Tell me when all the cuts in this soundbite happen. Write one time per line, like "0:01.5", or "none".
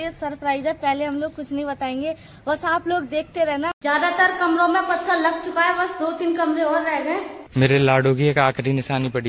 0:03.8
0:07.4

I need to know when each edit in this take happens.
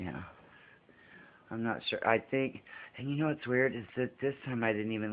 0:03.8

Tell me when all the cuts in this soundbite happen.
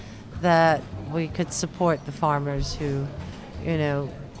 0:01.0

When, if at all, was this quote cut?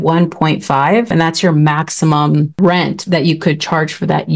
0:01.1
0:02.6

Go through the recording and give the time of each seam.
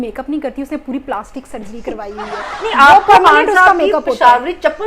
none

